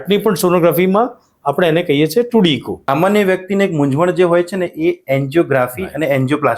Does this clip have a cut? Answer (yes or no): yes